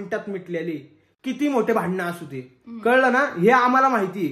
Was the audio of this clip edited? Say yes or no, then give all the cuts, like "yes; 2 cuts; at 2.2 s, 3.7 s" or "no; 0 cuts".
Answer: no; 0 cuts